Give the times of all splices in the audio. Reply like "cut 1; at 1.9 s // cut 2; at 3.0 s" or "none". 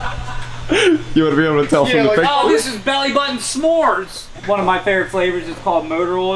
cut 1; at 4.3 s